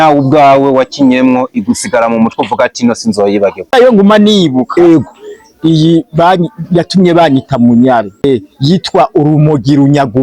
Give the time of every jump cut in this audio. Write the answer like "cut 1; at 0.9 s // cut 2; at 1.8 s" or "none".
cut 1; at 3.7 s // cut 2; at 8.2 s